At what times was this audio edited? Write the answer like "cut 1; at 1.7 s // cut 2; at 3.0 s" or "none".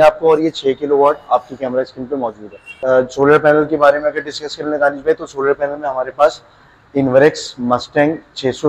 cut 1; at 3.0 s